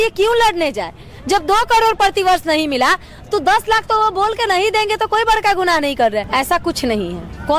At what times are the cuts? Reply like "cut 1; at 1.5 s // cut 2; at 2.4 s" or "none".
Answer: cut 1; at 6.3 s